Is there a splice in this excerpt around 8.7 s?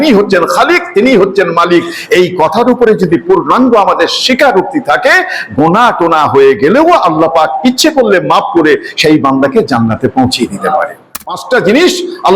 no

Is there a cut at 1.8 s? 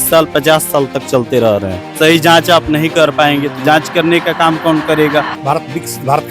yes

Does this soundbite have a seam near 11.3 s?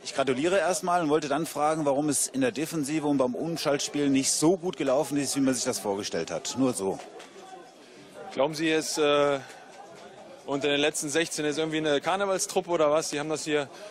yes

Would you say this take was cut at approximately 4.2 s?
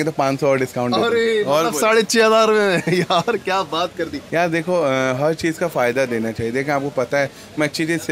yes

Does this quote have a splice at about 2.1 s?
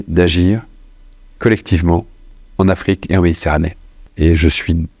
no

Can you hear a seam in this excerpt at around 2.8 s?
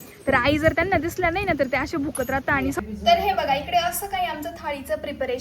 yes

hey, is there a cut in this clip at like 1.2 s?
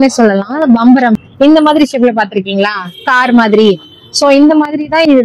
yes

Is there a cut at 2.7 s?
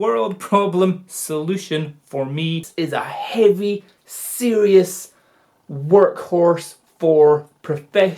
yes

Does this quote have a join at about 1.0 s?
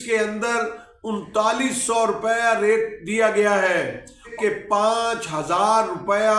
no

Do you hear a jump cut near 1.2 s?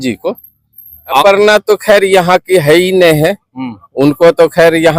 yes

